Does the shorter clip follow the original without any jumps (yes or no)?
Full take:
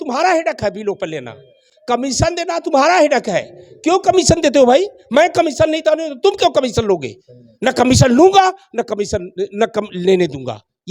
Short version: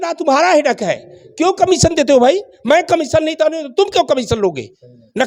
yes